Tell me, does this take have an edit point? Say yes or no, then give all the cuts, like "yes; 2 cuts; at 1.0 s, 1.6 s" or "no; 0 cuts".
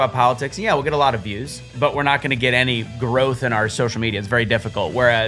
no; 0 cuts